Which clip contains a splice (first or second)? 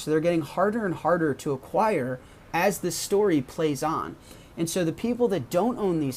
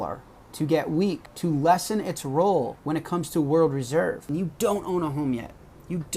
second